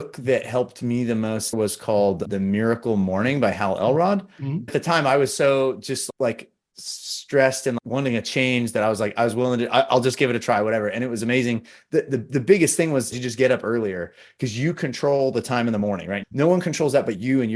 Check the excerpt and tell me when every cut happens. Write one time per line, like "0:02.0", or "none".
0:01.6
0:04.7
0:07.8